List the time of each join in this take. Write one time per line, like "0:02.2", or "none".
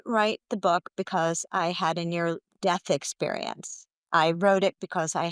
none